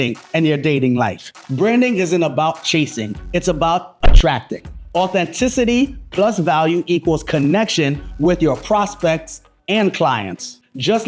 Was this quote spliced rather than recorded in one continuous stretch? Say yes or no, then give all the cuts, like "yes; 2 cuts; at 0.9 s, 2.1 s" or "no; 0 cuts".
no; 0 cuts